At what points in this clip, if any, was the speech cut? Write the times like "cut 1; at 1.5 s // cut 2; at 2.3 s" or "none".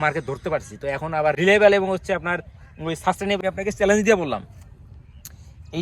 cut 1; at 1.4 s // cut 2; at 3.4 s